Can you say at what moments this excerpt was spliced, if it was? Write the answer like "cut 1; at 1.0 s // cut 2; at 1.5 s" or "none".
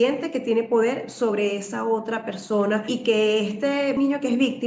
cut 1; at 2.9 s // cut 2; at 4.0 s